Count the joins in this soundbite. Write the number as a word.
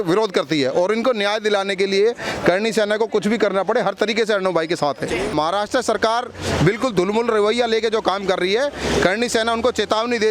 one